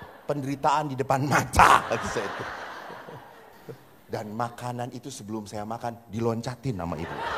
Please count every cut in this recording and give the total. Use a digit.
1